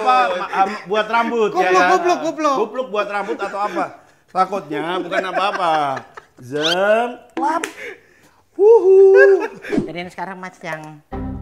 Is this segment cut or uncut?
cut